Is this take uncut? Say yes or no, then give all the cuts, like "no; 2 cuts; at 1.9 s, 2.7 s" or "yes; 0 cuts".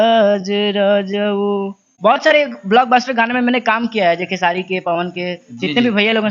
no; 1 cut; at 1.8 s